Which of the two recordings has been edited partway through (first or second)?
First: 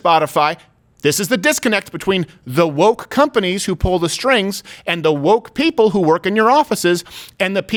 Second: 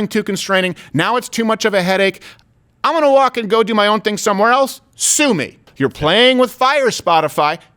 second